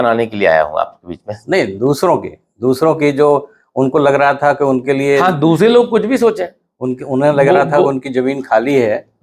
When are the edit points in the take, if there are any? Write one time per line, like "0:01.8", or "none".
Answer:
none